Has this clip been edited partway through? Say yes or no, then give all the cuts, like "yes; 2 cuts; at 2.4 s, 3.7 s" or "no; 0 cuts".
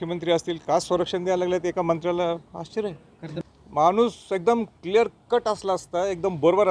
yes; 1 cut; at 3.3 s